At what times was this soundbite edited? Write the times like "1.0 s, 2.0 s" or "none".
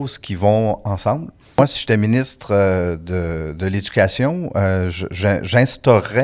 1.6 s